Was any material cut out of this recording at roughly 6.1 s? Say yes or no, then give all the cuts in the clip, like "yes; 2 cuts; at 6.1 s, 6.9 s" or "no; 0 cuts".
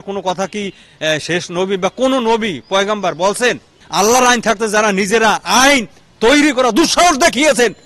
no; 1 cut; at 3.8 s